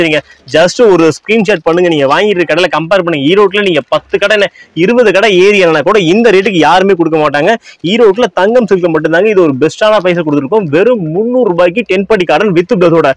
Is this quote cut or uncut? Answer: uncut